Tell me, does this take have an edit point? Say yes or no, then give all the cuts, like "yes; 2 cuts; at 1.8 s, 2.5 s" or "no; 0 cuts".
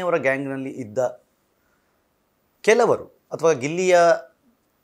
no; 0 cuts